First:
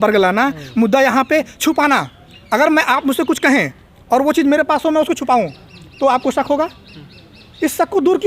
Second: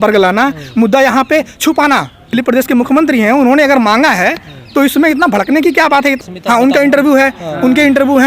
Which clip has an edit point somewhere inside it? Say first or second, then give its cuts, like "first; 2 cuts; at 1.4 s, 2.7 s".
second; 2 cuts; at 2.2 s, 6.2 s